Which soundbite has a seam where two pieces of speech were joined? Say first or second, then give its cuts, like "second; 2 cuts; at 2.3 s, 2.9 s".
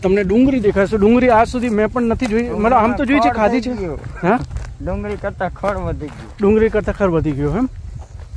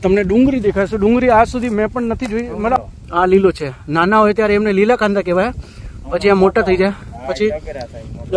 second; 1 cut; at 2.8 s